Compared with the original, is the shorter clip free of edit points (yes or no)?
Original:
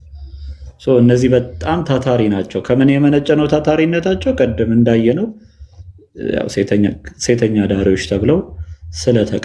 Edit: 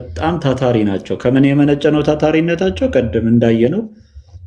yes